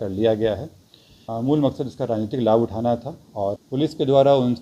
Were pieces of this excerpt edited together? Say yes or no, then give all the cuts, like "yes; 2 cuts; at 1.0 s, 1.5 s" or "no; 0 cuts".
yes; 2 cuts; at 1.2 s, 3.6 s